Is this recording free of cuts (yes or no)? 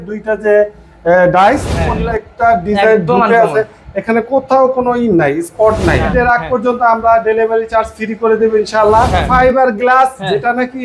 no